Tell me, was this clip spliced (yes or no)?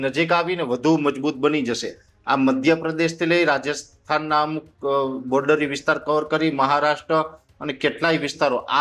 no